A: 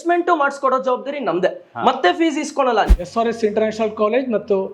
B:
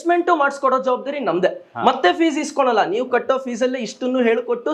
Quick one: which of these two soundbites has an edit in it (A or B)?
A